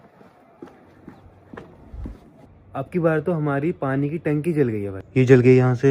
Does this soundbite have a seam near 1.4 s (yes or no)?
no